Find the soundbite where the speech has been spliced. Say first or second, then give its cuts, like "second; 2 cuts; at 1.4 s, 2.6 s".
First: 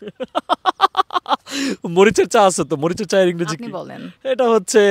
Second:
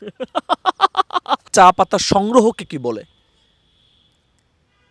second; 1 cut; at 1.5 s